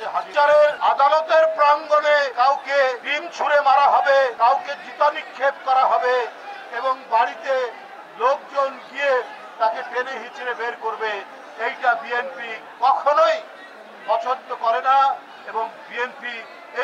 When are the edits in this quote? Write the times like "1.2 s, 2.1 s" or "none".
none